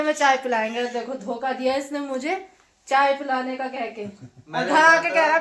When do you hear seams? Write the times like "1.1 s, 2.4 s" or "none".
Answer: none